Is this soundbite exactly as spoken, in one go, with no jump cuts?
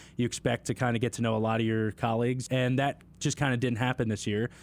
no; 1 cut; at 2.4 s

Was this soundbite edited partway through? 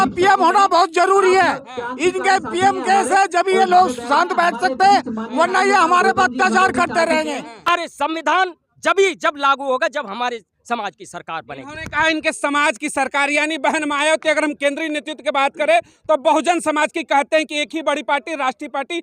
yes; 1 cut; at 7.7 s

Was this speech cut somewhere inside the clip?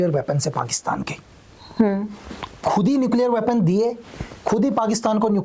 no; 0 cuts

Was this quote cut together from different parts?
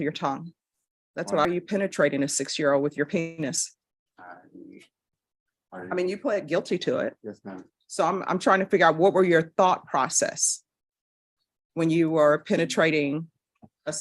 yes; 1 cut; at 1.5 s

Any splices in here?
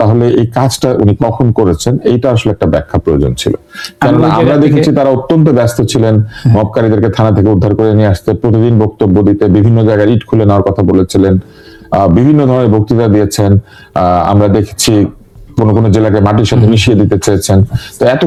no; 0 cuts

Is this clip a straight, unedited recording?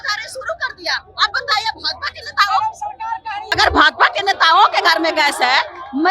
no; 1 cut; at 3.4 s

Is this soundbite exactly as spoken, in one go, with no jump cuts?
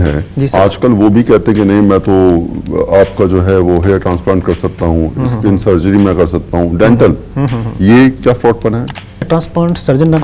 no; 1 cut; at 9.3 s

